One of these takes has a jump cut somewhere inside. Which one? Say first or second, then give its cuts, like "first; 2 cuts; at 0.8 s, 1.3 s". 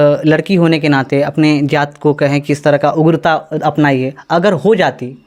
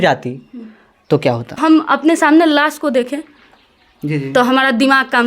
second; 1 cut; at 1.6 s